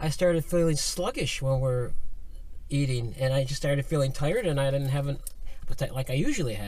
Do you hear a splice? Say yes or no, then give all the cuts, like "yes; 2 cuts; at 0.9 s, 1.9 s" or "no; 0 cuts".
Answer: yes; 1 cut; at 5.6 s